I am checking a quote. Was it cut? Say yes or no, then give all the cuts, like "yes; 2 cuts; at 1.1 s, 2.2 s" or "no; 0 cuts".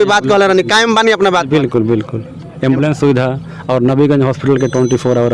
no; 0 cuts